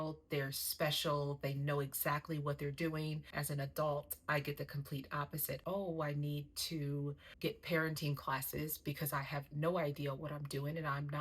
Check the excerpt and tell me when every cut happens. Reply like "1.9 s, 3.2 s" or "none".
3.3 s, 5.6 s